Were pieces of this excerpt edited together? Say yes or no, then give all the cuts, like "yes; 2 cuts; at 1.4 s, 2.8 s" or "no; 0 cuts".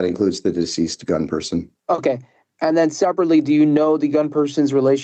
no; 0 cuts